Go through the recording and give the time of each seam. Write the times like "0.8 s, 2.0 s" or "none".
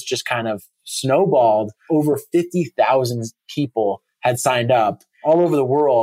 1.8 s, 5.1 s